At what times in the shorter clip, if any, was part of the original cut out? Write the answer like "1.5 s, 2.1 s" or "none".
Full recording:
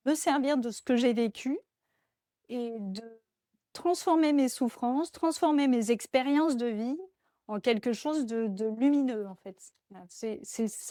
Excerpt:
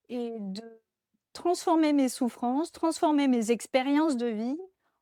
none